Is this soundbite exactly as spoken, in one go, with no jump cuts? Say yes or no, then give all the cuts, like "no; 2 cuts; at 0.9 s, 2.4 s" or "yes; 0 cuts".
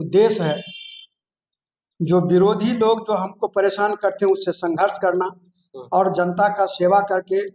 yes; 0 cuts